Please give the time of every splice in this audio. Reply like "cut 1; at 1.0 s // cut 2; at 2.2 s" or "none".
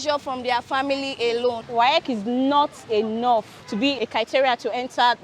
cut 1; at 1.6 s // cut 2; at 3.9 s